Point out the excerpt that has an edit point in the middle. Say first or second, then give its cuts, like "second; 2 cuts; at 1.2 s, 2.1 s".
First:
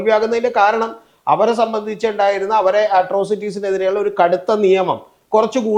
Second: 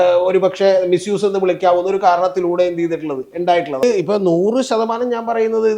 second; 1 cut; at 3.8 s